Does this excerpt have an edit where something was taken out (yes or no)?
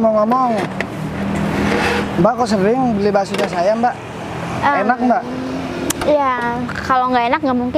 no